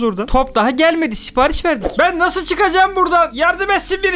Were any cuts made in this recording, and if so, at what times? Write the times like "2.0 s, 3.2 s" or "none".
1.8 s